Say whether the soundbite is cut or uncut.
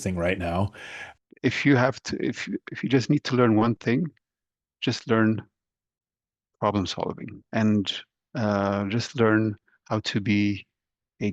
cut